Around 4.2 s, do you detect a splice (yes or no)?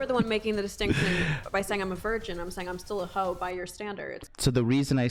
yes